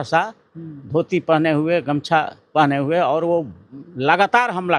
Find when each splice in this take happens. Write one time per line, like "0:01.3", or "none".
none